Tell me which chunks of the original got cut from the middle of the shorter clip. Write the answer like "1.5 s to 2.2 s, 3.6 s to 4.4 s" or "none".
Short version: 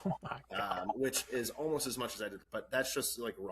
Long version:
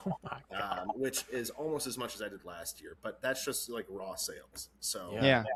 2.4 s to 2.9 s